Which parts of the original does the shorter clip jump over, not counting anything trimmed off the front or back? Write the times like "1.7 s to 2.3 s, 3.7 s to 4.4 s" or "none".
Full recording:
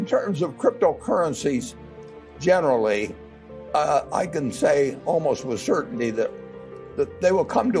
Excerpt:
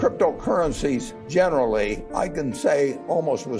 1.8 s to 2.3 s, 3.2 s to 4.1 s